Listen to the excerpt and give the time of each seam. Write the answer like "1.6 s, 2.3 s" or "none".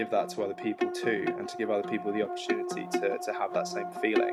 none

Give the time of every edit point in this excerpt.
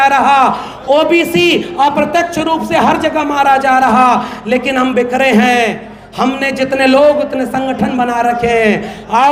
none

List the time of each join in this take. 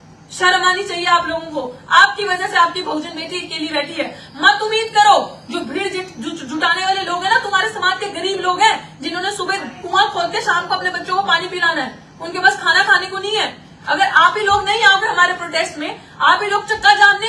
none

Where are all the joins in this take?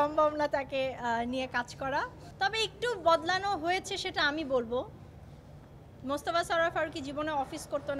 none

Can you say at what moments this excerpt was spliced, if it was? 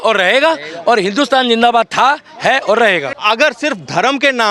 3.1 s

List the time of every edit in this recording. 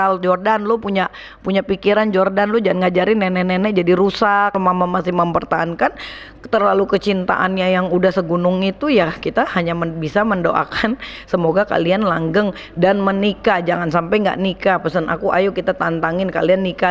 4.6 s

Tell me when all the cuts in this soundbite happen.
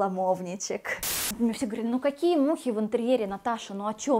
1.2 s

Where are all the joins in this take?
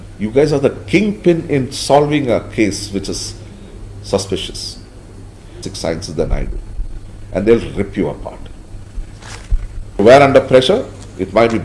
5.7 s, 10.0 s

